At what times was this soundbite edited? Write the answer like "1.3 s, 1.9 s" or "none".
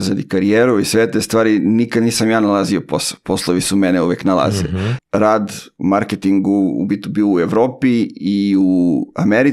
4.9 s